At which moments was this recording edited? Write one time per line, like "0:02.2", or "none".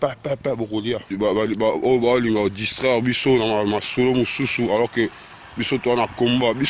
0:01.1